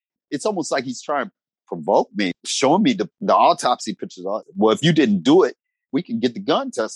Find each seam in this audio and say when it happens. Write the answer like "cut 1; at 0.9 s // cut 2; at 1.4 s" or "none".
cut 1; at 1.5 s // cut 2; at 2.3 s // cut 3; at 3.1 s // cut 4; at 4.4 s // cut 5; at 5.9 s